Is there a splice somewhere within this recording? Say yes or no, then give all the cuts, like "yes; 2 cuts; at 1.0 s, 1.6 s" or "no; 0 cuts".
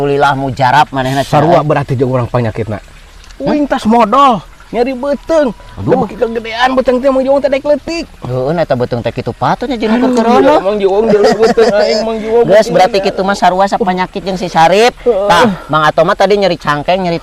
no; 0 cuts